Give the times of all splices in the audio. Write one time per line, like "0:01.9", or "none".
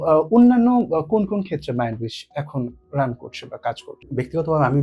0:03.9